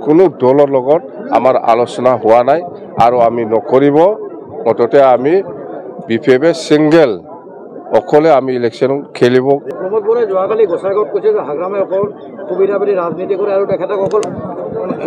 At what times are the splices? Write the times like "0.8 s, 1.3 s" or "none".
9.7 s